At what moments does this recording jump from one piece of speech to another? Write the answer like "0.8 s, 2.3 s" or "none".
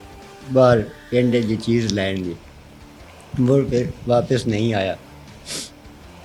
none